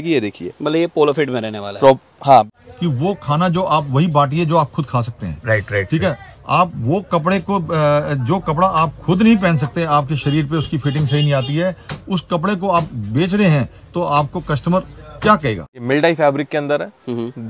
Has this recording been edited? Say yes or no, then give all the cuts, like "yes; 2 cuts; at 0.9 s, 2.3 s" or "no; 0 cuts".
yes; 2 cuts; at 2.5 s, 15.7 s